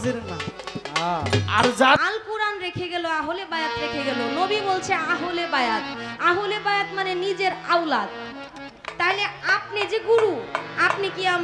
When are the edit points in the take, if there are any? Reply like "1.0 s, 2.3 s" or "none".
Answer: 2.0 s